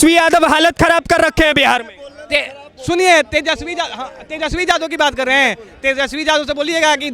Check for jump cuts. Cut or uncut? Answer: uncut